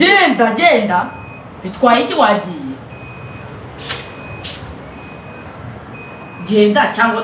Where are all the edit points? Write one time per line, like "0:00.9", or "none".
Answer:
none